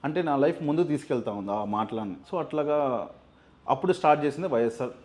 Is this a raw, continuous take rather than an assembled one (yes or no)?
no